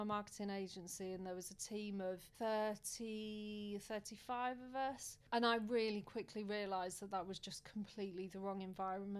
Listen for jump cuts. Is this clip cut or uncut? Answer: cut